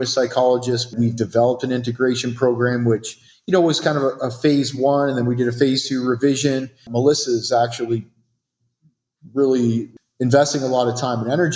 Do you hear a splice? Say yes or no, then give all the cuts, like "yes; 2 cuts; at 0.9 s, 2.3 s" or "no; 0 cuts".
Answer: yes; 3 cuts; at 0.9 s, 6.9 s, 9.9 s